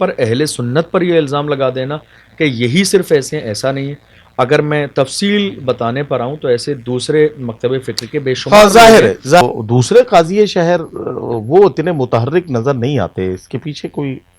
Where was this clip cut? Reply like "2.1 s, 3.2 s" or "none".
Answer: 9.4 s